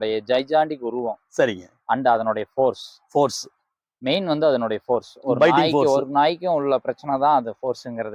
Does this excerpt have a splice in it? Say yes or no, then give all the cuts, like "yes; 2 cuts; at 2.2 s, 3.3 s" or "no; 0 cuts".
no; 0 cuts